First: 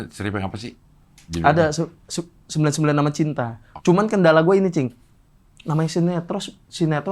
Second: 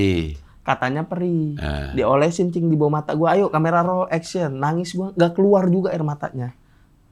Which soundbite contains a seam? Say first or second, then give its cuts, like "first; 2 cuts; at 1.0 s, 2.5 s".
first; 1 cut; at 3.7 s